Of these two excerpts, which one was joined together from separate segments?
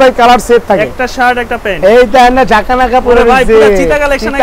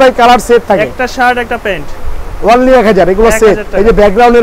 first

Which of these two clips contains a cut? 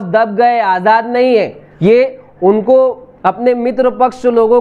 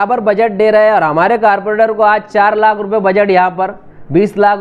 first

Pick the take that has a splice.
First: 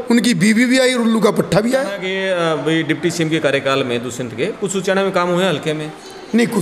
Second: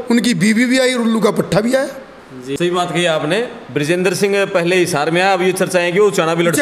first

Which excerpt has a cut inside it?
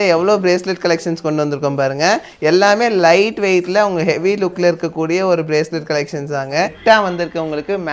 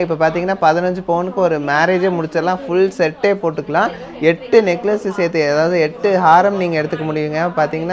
first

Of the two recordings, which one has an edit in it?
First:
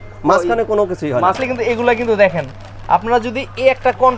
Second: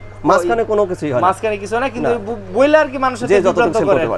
first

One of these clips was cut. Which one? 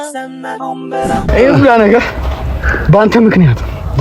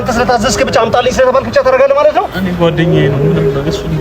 first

